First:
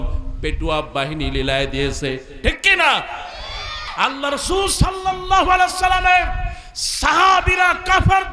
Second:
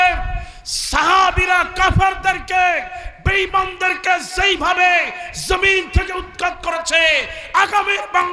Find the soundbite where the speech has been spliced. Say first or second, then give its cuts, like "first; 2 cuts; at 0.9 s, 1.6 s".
first; 1 cut; at 3.8 s